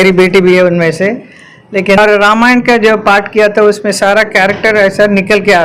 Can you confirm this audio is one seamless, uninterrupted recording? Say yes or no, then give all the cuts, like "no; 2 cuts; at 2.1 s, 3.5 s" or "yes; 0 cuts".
no; 1 cut; at 2.0 s